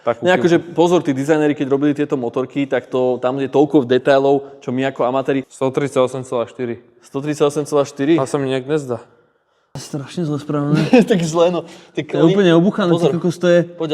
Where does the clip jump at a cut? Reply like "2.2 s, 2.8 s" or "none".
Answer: 5.5 s, 9.7 s